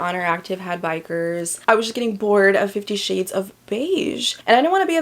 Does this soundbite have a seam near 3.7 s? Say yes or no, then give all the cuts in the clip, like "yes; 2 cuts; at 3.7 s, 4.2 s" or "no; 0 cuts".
no; 1 cut; at 1.5 s